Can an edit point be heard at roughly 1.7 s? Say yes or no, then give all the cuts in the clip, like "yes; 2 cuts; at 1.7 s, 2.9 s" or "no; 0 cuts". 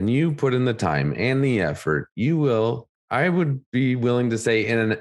no; 1 cut; at 2.9 s